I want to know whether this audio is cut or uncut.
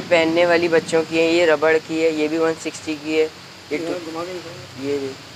uncut